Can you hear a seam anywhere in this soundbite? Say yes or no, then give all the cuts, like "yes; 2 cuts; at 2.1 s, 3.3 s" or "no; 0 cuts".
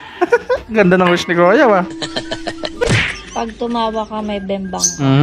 yes; 1 cut; at 2.8 s